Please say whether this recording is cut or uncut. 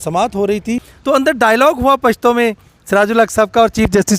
cut